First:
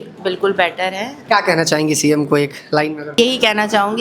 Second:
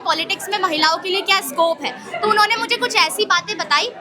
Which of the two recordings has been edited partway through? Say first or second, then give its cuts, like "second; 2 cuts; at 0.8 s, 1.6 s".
first; 2 cuts; at 1.1 s, 3.2 s